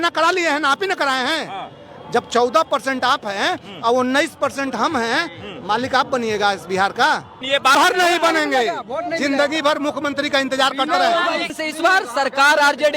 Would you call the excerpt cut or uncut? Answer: cut